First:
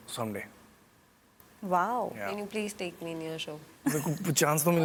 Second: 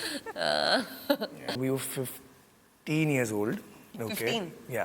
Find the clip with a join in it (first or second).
second